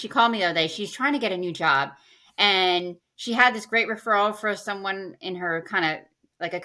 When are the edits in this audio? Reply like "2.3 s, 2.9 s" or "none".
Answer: none